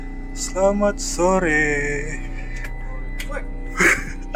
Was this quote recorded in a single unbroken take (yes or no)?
yes